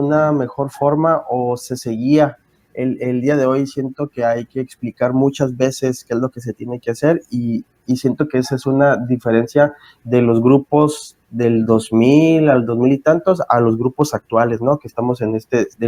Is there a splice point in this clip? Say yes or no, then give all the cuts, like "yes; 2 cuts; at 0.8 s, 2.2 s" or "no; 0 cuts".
no; 0 cuts